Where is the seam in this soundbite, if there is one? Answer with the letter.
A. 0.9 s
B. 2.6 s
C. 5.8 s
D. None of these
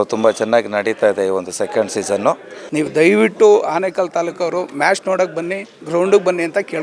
B